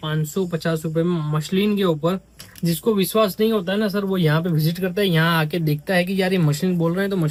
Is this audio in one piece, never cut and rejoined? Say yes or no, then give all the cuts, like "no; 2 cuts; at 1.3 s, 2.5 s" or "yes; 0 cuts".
yes; 0 cuts